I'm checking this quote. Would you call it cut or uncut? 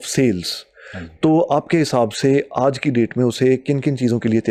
uncut